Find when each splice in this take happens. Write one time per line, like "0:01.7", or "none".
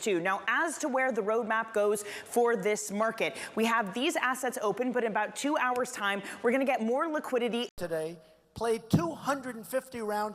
0:07.7